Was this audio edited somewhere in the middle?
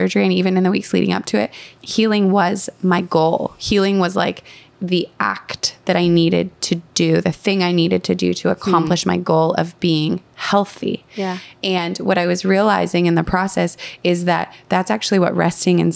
yes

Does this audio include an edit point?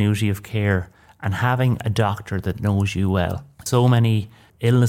no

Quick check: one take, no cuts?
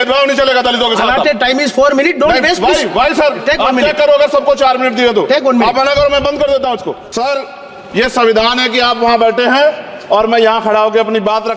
no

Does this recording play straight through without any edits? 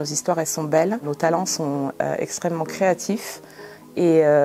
no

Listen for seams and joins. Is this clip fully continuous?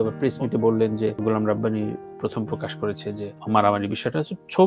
no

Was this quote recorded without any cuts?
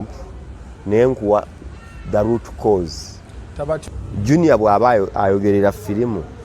no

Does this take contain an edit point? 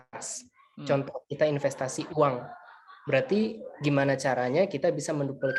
no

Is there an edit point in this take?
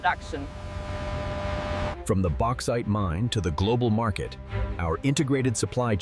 yes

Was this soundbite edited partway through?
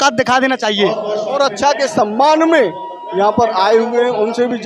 no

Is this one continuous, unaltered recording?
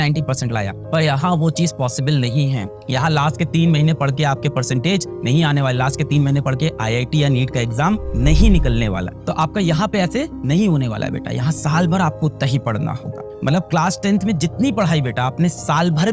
yes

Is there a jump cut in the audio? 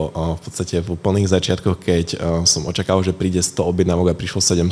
no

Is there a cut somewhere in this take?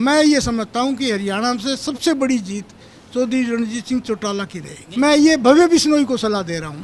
yes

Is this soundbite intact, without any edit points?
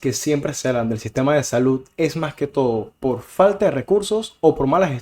yes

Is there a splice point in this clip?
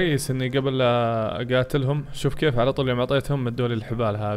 no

